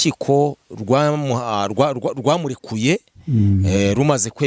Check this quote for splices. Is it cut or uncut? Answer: uncut